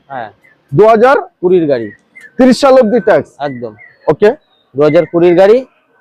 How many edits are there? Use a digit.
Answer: 0